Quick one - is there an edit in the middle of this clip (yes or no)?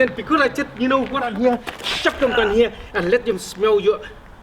yes